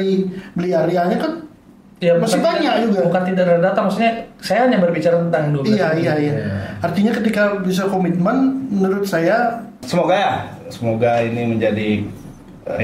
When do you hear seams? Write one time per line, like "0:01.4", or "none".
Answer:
0:09.8